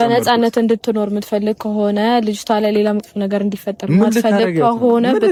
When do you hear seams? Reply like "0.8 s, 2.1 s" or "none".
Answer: none